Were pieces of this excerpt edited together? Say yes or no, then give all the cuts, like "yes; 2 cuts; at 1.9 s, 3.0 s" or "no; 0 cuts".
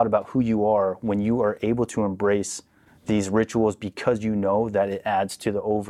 no; 0 cuts